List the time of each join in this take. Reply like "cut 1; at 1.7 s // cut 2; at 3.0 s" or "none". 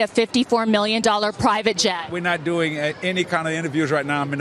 none